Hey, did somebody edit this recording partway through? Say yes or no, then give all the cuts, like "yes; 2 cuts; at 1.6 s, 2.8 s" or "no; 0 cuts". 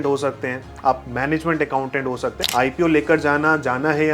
yes; 1 cut; at 2.4 s